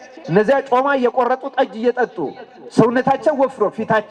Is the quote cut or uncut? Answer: uncut